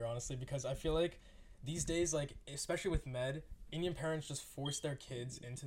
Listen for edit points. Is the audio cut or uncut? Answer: uncut